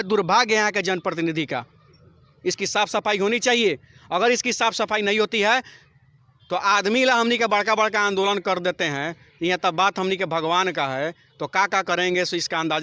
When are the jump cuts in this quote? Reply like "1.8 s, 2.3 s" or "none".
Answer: none

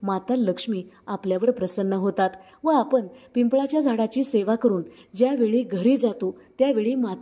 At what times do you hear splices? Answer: none

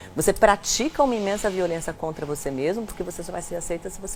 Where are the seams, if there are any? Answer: none

